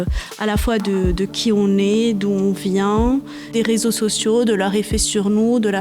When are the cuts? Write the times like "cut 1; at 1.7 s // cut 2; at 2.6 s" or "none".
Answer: cut 1; at 3.5 s